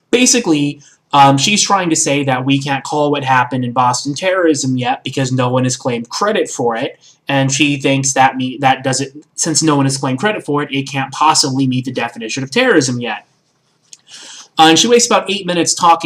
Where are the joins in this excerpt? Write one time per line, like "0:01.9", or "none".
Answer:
none